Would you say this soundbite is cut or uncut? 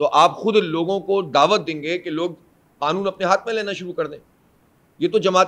uncut